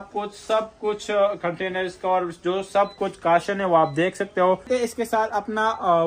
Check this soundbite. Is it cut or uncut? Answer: cut